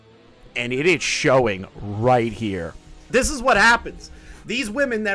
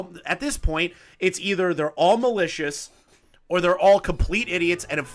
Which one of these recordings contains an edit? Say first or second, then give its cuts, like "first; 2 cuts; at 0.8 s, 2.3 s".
first; 1 cut; at 3.1 s